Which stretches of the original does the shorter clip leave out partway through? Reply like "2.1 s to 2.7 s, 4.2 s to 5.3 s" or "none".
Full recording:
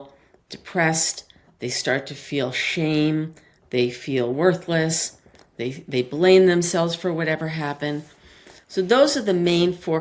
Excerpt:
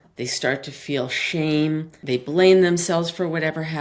3.4 s to 5.8 s